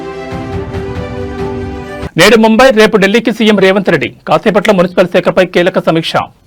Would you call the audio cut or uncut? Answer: uncut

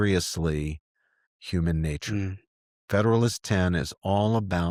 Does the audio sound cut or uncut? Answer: uncut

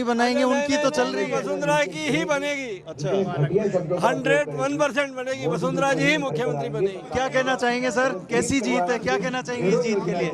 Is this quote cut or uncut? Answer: cut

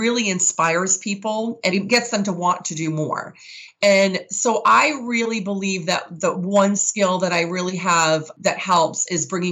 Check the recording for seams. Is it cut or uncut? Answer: cut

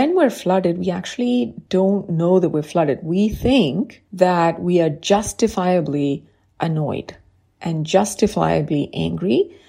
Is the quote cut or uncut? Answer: cut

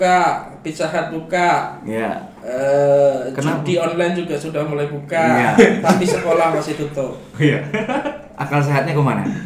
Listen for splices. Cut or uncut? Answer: uncut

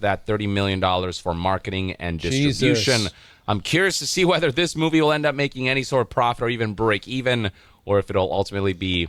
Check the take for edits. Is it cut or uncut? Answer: uncut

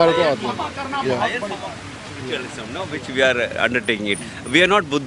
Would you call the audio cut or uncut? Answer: uncut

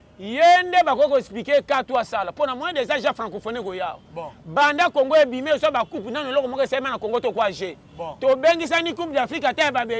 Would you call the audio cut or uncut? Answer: uncut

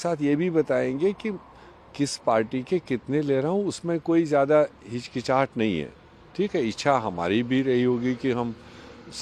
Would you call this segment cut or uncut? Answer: uncut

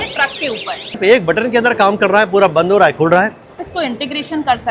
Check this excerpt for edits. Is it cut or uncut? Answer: cut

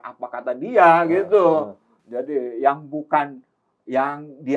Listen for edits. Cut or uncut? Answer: uncut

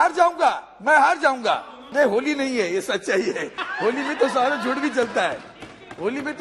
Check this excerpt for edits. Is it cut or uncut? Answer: cut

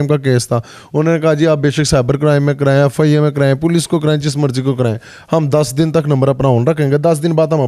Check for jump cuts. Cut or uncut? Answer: uncut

